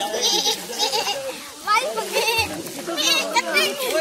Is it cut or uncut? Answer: uncut